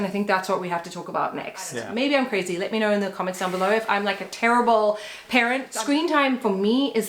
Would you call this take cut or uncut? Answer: cut